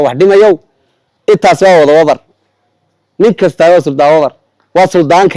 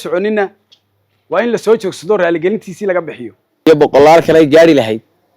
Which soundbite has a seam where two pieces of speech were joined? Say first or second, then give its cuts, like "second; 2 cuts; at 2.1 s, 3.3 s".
second; 1 cut; at 3.7 s